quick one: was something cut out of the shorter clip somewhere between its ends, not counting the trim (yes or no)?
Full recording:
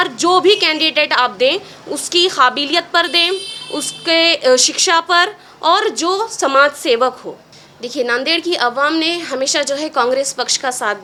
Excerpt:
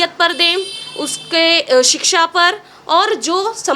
no